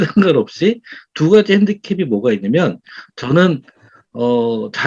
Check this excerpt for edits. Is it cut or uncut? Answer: uncut